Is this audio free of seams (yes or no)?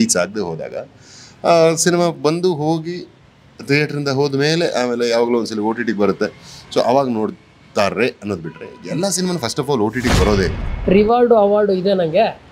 no